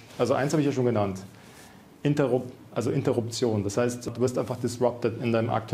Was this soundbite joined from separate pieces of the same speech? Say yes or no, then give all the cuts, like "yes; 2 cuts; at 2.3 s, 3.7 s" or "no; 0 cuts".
yes; 1 cut; at 4.1 s